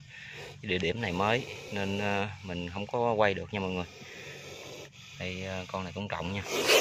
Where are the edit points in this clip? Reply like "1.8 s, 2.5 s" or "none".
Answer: none